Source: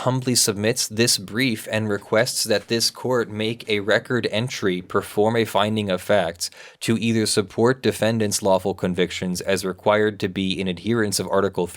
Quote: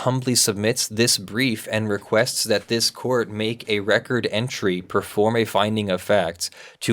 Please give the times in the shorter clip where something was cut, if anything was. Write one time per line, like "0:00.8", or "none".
none